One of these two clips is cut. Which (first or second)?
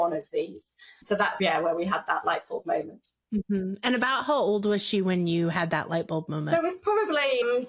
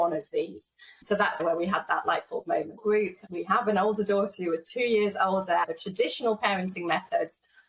second